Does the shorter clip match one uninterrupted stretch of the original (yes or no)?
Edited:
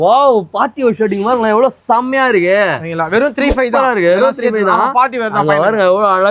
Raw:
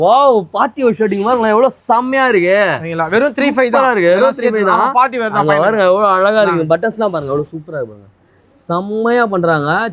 yes